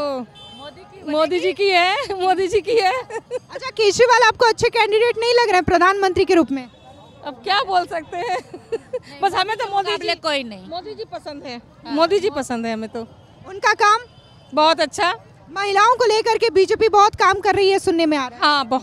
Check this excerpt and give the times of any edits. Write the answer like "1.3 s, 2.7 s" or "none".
none